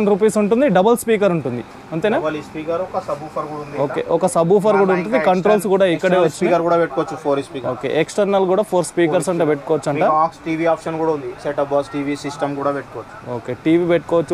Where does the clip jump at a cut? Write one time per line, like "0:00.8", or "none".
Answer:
none